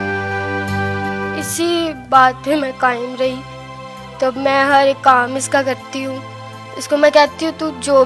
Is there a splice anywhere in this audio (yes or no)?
no